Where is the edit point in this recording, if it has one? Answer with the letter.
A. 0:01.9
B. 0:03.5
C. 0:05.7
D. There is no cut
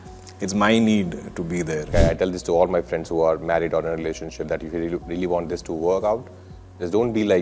A